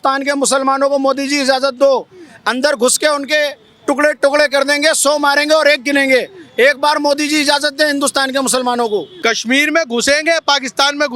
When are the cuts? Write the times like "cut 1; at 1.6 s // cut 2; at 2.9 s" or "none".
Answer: cut 1; at 9.1 s

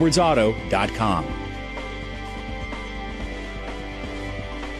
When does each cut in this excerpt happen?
cut 1; at 1.3 s

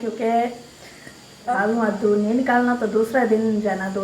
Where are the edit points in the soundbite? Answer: cut 1; at 1.5 s

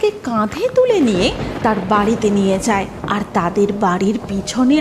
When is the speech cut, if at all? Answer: cut 1; at 3.0 s

